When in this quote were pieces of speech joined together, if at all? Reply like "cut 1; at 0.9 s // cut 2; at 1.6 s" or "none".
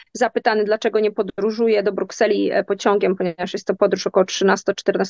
none